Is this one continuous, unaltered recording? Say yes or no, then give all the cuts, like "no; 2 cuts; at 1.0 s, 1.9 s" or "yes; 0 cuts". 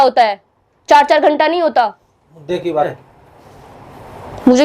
no; 1 cut; at 2.9 s